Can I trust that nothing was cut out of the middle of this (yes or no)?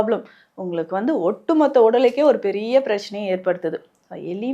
yes